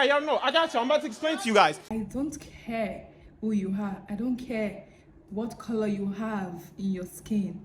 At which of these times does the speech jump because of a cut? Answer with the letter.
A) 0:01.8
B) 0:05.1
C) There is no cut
A